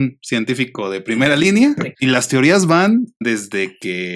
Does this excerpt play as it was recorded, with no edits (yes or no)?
no